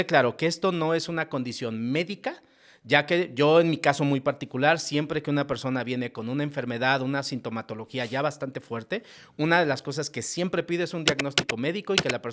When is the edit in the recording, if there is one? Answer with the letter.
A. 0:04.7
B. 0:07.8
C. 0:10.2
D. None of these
D